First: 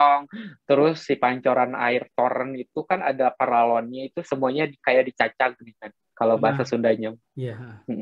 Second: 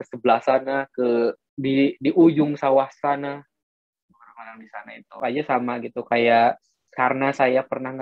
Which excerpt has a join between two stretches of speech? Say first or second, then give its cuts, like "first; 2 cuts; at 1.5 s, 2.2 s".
second; 1 cut; at 5.2 s